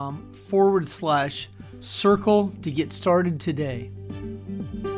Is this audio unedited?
no; 1 cut; at 3.9 s

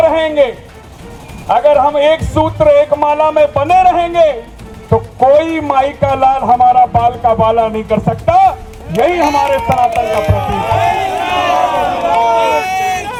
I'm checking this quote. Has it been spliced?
no; 0 cuts

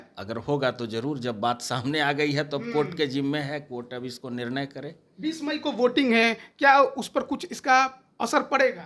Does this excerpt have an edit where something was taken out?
no; 0 cuts

